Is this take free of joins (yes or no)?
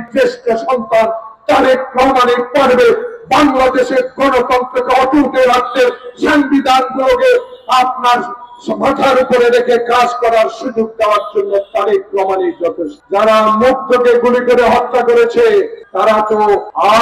no